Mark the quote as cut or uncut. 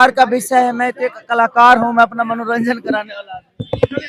uncut